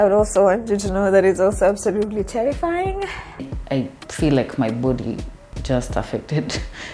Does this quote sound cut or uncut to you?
cut